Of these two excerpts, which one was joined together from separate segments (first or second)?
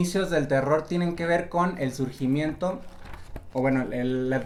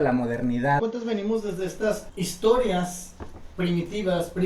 second